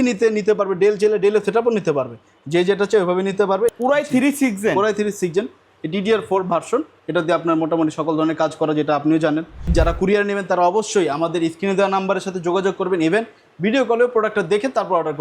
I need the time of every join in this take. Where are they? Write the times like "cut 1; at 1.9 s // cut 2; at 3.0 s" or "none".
cut 1; at 3.7 s // cut 2; at 9.7 s